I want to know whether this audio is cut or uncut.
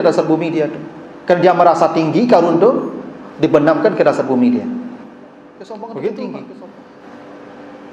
cut